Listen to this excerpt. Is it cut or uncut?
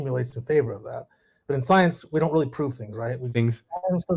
cut